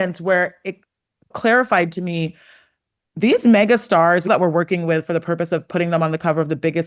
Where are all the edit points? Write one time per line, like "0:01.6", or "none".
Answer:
0:01.3
0:04.3